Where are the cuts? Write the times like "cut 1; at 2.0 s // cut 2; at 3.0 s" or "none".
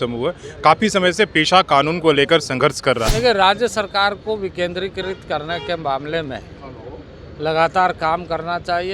cut 1; at 3.1 s